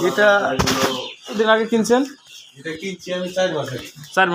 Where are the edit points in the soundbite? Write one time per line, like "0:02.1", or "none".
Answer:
0:01.4